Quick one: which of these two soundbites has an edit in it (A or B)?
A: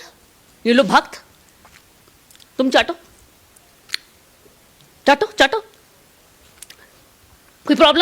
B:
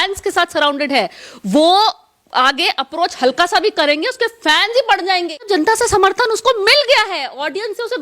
B